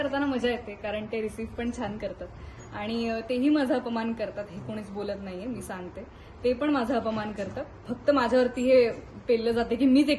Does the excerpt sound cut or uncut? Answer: uncut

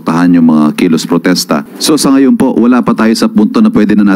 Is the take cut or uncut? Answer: cut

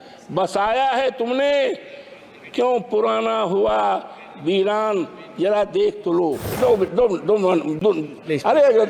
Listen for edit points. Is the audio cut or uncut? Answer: cut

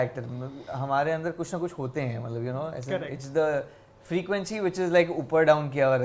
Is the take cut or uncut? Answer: uncut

